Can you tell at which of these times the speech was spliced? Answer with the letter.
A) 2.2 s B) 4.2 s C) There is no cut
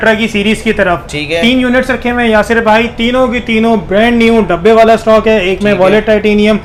C